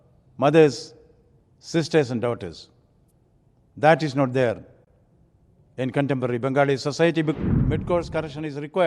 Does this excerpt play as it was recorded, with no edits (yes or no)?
no